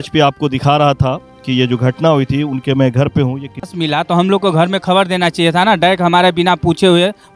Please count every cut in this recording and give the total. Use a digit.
1